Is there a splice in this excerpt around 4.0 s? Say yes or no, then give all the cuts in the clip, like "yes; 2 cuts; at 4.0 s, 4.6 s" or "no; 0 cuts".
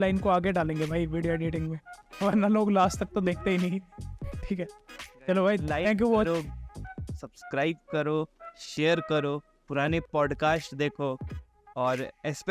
no; 0 cuts